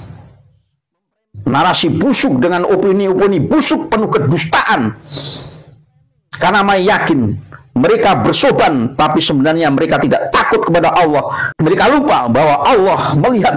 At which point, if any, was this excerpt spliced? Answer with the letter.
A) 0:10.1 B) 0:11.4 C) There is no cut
B